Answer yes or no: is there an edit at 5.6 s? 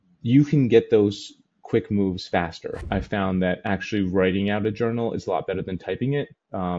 no